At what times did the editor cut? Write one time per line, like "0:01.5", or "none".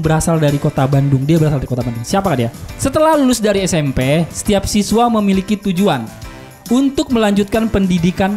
0:02.8